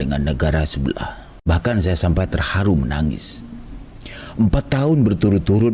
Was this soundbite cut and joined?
no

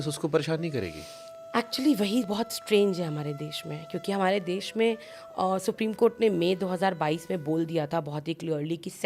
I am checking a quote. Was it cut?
no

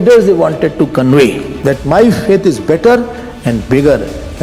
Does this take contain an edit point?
yes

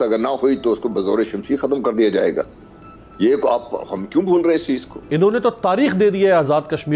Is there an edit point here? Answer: yes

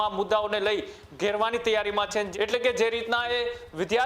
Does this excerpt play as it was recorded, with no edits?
no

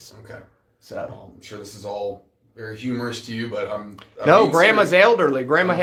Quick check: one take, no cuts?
yes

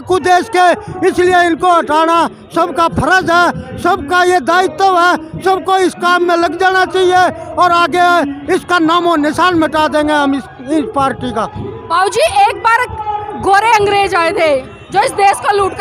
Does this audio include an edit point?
no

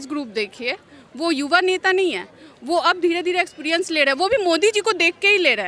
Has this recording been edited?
no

